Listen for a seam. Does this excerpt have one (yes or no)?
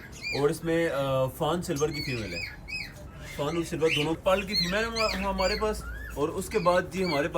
yes